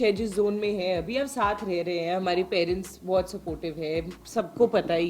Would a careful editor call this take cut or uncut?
uncut